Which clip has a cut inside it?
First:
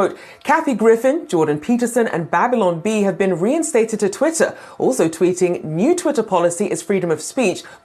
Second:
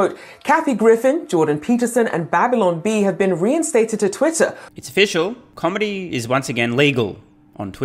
first; 1 cut; at 4.6 s

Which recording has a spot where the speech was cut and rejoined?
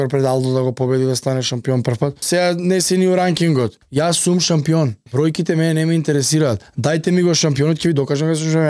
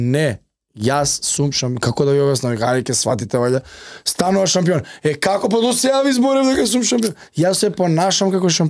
first; 4 cuts; at 2.2 s, 3.8 s, 5.0 s, 6.7 s

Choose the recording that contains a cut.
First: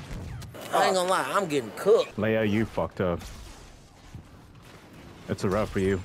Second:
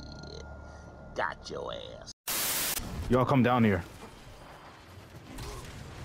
second; 1 cut; at 2.8 s

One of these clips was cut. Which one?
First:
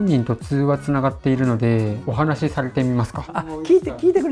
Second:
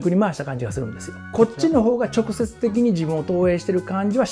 first; 1 cut; at 2.1 s

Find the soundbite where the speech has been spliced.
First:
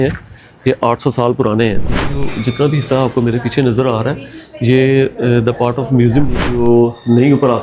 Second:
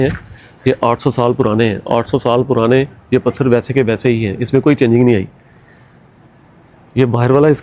first; 2 cuts; at 2.0 s, 6.3 s

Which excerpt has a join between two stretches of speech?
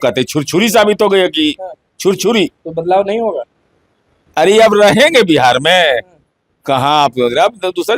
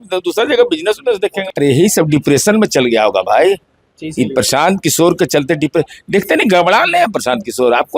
second; 1 cut; at 1.4 s

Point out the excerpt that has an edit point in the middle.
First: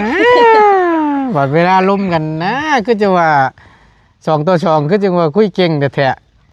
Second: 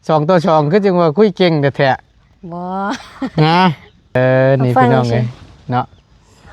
second; 1 cut; at 4.2 s

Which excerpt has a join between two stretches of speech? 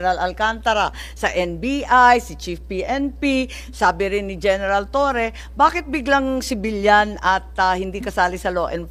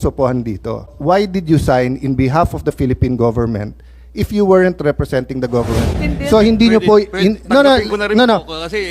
second; 2 cuts; at 0.9 s, 5.9 s

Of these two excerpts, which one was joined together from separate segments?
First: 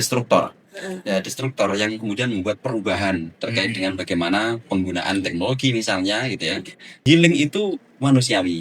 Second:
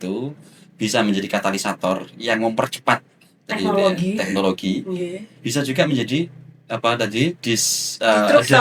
first; 1 cut; at 7.0 s

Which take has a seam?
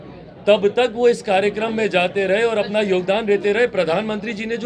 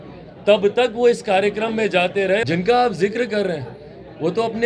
second; 1 cut; at 2.4 s

